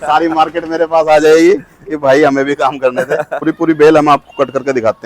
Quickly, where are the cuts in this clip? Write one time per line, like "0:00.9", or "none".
0:03.4